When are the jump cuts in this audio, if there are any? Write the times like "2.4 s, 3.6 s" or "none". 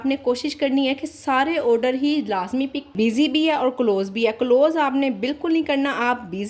2.8 s